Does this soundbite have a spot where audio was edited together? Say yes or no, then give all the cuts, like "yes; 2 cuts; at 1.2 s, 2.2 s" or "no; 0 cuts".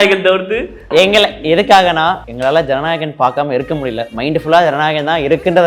yes; 2 cuts; at 0.9 s, 2.3 s